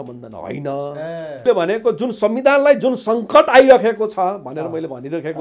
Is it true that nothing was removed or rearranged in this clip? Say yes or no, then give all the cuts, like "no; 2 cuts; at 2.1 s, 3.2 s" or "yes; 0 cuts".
no; 1 cut; at 1.4 s